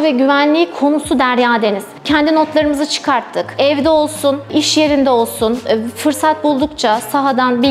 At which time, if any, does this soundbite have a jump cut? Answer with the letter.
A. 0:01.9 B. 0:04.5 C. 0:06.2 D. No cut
A